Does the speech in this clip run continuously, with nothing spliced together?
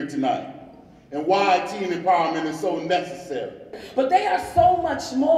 no; 1 cut; at 3.8 s

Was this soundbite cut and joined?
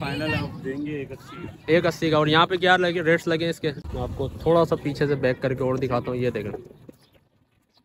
yes; 1 cut; at 3.8 s

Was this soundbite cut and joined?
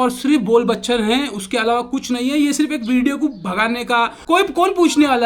yes; 1 cut; at 4.2 s

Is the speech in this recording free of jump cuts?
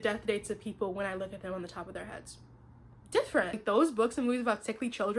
no; 1 cut; at 3.6 s

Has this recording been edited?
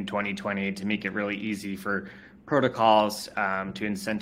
no; 0 cuts

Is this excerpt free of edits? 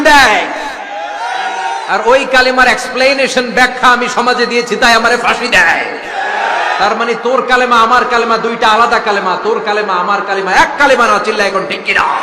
yes; 0 cuts

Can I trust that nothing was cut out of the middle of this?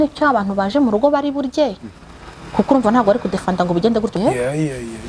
no; 1 cut; at 4.2 s

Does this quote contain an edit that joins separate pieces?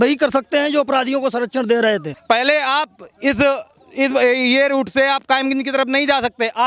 yes; 1 cut; at 2.1 s

